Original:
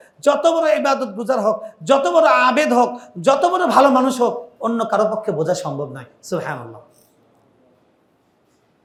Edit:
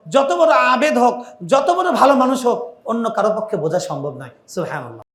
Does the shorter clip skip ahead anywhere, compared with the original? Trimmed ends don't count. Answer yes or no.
no